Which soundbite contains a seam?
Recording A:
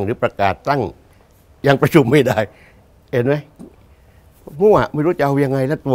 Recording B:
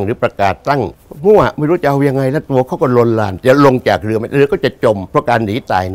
B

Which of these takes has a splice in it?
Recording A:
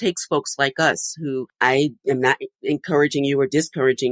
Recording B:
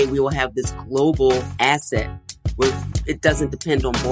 A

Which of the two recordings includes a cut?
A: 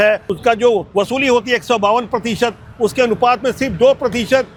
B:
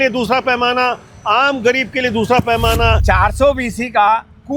B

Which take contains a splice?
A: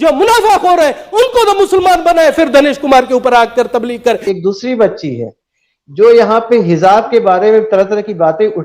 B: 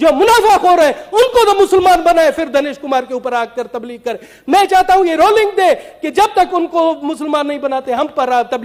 A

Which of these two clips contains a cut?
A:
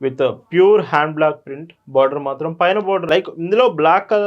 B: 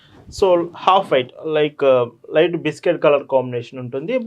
A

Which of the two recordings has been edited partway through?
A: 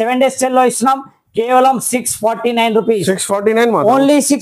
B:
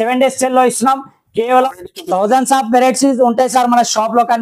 B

